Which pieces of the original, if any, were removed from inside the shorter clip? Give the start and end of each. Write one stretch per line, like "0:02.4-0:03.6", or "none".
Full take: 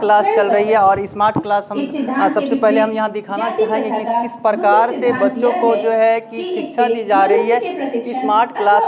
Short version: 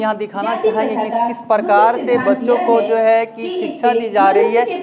none